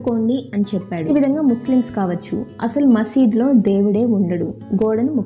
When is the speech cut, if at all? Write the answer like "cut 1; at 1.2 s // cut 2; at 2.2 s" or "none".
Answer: cut 1; at 1.0 s

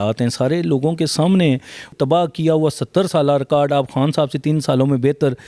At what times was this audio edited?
cut 1; at 1.9 s

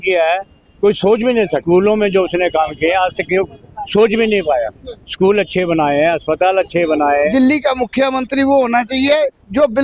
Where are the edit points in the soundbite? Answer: cut 1; at 1.6 s // cut 2; at 7.3 s

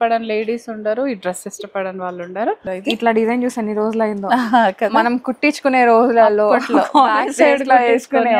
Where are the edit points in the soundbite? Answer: cut 1; at 2.6 s

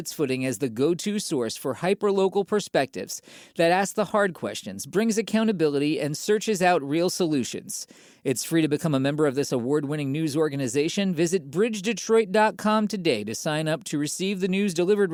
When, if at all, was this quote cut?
none

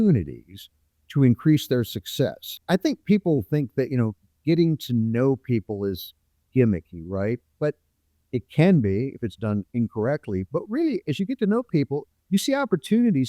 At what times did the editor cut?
cut 1; at 2.5 s

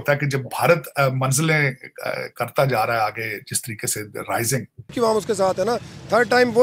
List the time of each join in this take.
cut 1; at 4.9 s

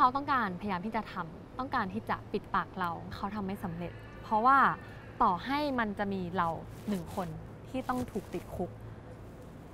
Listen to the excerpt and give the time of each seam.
cut 1; at 3.1 s

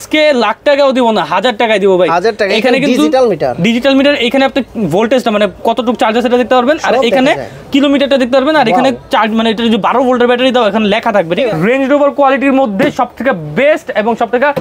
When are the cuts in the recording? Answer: cut 1; at 11.5 s

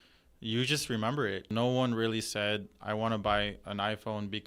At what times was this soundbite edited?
cut 1; at 1.5 s

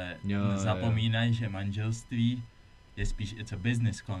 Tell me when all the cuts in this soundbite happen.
none

